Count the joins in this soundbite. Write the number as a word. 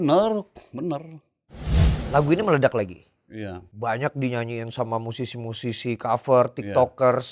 one